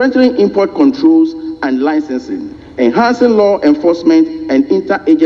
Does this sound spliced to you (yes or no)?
no